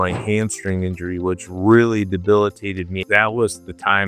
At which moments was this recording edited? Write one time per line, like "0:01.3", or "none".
0:03.0